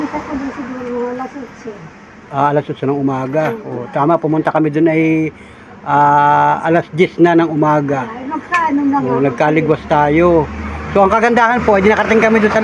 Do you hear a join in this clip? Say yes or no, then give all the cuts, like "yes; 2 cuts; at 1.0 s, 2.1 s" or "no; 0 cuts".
no; 0 cuts